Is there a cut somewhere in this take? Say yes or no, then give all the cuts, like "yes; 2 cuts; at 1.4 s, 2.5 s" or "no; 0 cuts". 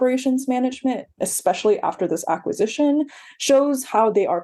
yes; 1 cut; at 1.1 s